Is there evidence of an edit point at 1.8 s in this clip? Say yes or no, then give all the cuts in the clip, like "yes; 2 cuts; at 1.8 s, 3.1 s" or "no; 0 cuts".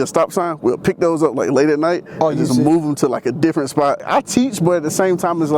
no; 1 cut; at 4.1 s